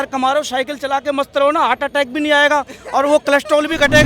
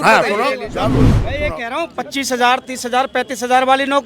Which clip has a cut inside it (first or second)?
second